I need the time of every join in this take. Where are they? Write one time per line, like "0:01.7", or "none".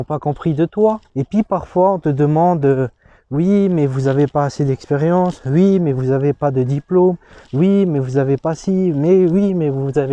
0:01.1